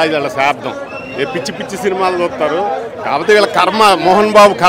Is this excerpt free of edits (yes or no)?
yes